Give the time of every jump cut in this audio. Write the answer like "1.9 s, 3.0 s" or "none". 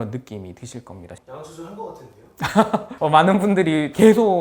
1.1 s